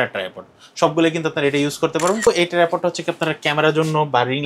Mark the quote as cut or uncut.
cut